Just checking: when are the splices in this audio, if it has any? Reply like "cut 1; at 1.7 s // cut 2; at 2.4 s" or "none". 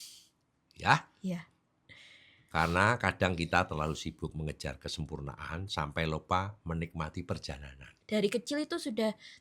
cut 1; at 8.0 s